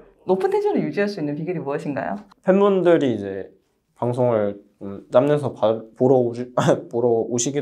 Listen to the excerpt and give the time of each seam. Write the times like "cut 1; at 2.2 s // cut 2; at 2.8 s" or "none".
cut 1; at 2.3 s